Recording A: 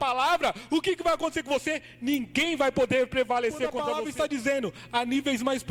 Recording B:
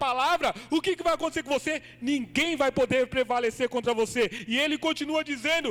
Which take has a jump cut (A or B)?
A